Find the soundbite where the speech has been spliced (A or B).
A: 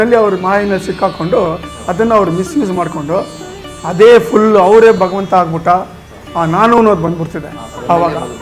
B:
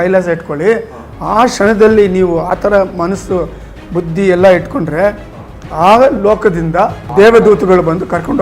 B